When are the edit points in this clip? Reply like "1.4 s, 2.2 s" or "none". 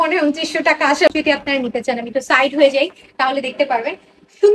1.1 s